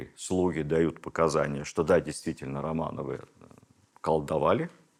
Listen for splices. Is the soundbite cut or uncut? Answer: uncut